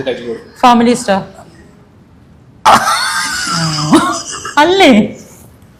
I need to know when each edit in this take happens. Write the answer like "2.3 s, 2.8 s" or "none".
none